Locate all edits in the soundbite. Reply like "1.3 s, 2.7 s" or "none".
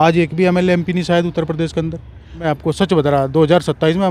2.4 s